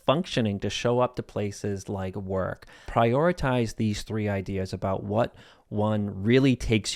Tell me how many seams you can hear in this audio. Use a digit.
1